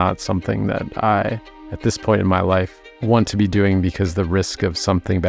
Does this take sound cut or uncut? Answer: uncut